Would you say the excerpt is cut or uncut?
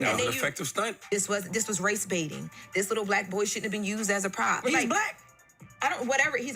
cut